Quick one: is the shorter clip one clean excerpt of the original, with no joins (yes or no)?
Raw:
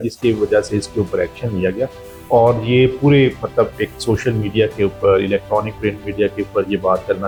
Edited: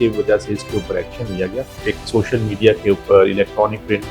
no